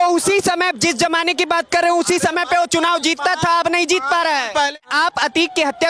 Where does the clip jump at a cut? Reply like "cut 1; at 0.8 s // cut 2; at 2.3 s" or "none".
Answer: cut 1; at 4.8 s